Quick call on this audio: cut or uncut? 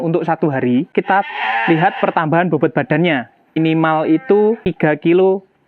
cut